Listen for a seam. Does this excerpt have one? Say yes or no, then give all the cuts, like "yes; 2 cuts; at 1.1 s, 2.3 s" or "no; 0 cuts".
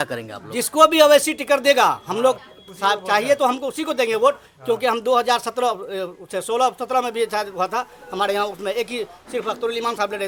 no; 0 cuts